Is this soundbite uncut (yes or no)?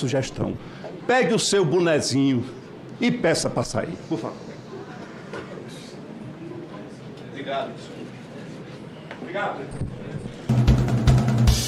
no